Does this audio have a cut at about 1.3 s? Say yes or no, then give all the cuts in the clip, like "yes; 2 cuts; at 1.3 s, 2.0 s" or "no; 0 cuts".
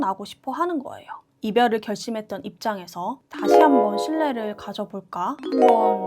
yes; 1 cut; at 1.3 s